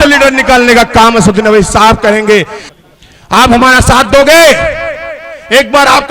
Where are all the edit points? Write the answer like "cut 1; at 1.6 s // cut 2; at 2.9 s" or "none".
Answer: cut 1; at 2.6 s